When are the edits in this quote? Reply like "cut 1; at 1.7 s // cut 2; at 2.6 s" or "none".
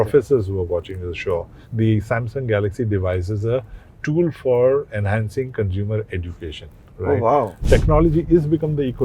cut 1; at 1.6 s // cut 2; at 7.6 s

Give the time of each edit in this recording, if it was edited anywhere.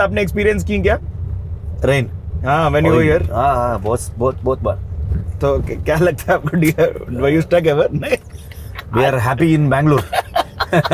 none

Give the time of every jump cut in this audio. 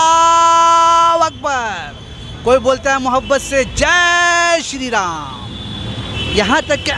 none

